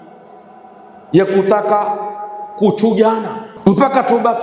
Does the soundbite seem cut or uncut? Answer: cut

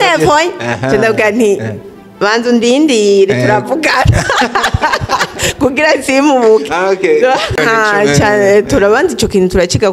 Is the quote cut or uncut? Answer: cut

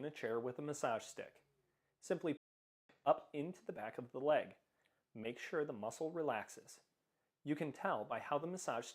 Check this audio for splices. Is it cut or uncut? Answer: cut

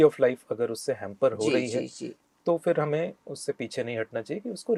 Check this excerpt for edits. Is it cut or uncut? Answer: uncut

